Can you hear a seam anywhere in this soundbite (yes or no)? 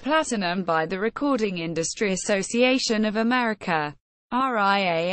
no